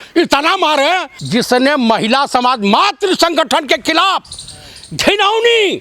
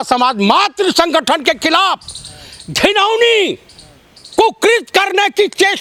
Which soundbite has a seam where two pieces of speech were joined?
first; 1 cut; at 1.1 s

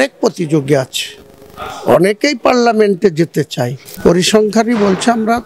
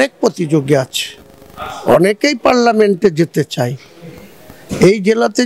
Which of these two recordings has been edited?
first; 1 cut; at 3.8 s

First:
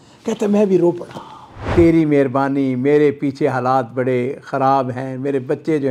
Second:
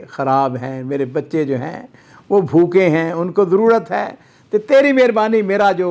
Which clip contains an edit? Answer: first; 1 cut; at 1.7 s

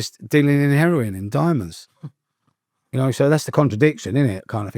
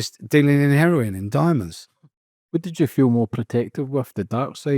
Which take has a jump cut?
second; 1 cut; at 2.4 s

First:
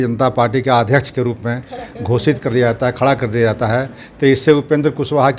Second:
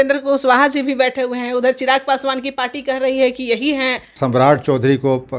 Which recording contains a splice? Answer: second; 1 cut; at 4.1 s

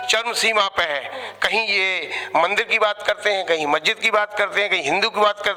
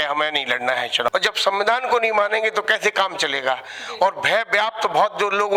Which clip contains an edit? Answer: second; 1 cut; at 1.1 s

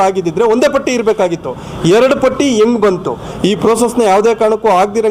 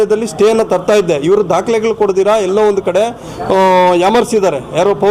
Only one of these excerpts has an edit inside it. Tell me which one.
first; 1 cut; at 3.3 s

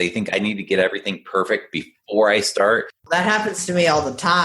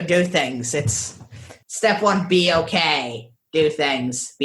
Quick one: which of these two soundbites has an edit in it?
first; 1 cut; at 2.9 s

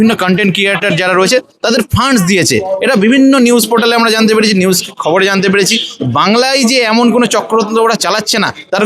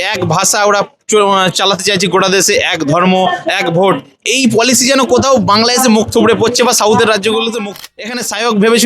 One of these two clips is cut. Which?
second; 1 cut; at 7.8 s

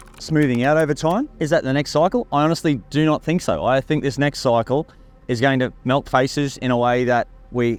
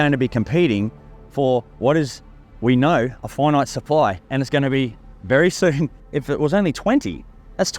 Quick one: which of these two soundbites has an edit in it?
second; 1 cut; at 6.0 s

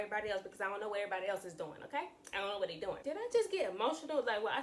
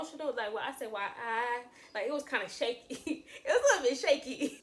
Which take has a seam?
first; 1 cut; at 3.0 s

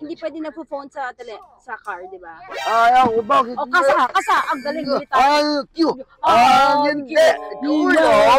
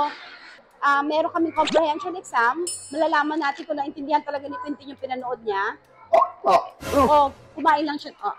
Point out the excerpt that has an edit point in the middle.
first; 2 cuts; at 2.5 s, 7.5 s

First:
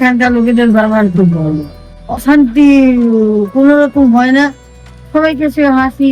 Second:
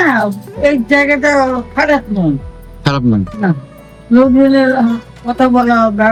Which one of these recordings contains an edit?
first; 1 cut; at 2.2 s

